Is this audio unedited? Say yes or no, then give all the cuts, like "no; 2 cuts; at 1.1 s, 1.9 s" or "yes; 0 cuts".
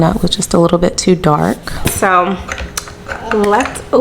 no; 1 cut; at 1.8 s